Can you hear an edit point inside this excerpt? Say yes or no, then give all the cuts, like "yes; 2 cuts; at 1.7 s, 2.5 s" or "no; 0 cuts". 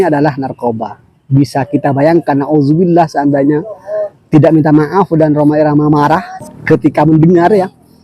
yes; 1 cut; at 6.4 s